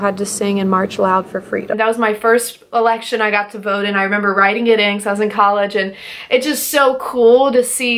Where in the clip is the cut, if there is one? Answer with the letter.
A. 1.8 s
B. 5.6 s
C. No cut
A